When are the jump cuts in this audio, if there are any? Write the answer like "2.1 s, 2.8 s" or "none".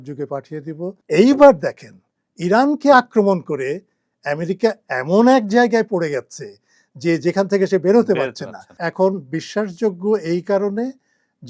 1.0 s, 8.7 s